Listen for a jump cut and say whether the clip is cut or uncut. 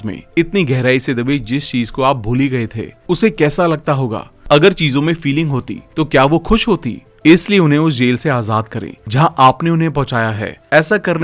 uncut